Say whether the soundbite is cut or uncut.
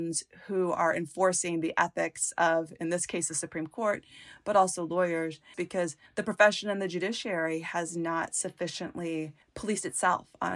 cut